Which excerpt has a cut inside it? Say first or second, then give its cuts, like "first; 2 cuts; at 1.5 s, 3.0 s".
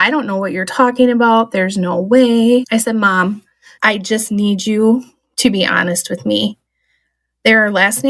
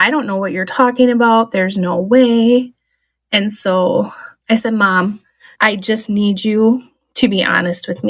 first; 1 cut; at 2.7 s